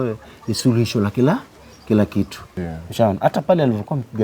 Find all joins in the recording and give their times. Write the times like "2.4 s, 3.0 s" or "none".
2.5 s